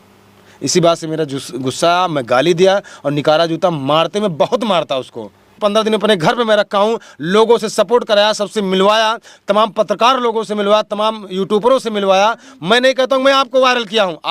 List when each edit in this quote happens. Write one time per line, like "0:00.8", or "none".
0:05.6

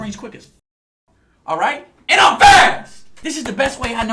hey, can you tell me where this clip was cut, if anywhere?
0:03.1

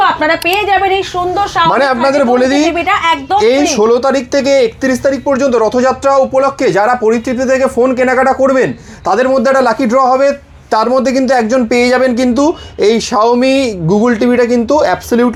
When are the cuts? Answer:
none

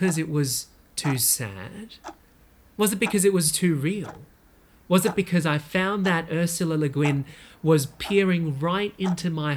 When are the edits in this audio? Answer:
none

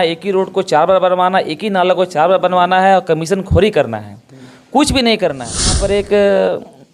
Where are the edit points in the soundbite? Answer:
0:05.7

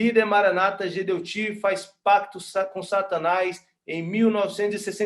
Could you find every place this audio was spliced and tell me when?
none

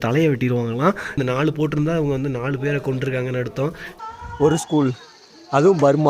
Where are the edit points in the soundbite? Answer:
0:01.2
0:04.0

